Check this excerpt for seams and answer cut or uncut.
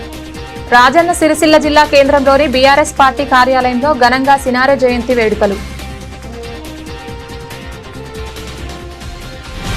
uncut